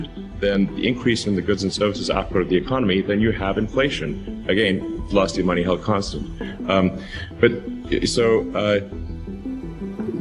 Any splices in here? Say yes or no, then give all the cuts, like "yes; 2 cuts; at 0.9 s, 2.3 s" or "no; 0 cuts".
no; 0 cuts